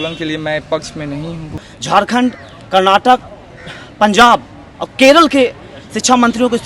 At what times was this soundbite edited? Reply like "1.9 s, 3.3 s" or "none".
1.6 s